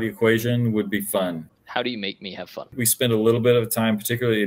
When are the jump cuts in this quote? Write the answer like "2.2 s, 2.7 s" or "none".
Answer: 1.5 s, 2.8 s